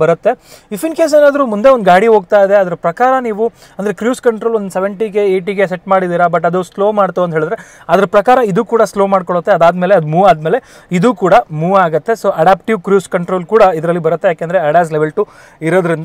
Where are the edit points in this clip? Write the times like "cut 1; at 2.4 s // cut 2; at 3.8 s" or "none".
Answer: none